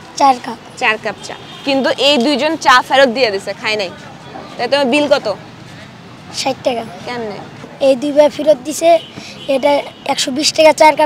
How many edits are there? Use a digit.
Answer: 1